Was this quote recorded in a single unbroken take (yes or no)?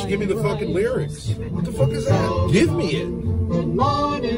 no